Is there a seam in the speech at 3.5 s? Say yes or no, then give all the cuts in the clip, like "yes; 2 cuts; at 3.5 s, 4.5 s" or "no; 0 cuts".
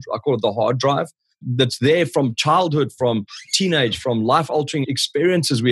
no; 1 cut; at 4.8 s